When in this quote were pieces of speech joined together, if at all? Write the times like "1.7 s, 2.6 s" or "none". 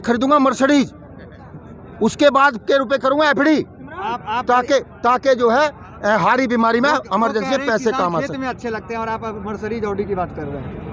none